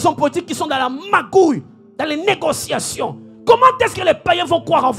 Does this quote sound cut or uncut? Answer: uncut